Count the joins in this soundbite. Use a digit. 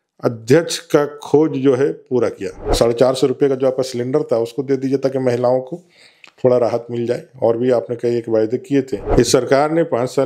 2